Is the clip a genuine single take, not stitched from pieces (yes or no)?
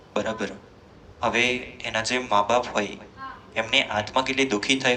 yes